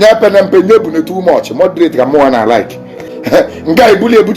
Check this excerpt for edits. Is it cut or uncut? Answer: cut